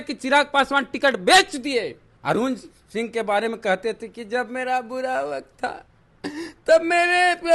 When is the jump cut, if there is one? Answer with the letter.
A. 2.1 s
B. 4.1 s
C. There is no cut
A